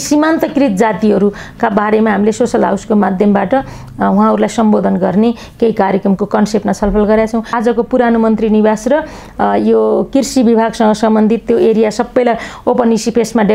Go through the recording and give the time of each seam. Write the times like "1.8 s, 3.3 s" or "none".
7.5 s